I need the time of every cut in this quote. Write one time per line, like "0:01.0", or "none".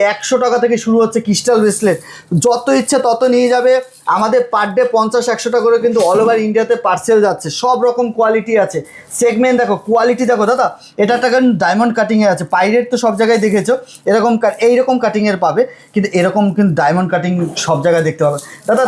none